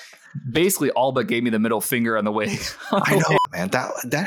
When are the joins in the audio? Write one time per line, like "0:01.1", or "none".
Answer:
0:03.4